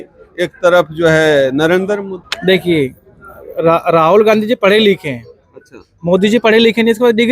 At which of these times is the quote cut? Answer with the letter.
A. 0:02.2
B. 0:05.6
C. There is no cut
A